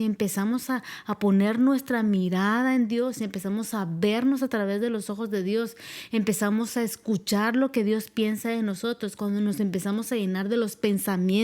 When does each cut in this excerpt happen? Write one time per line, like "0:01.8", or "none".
none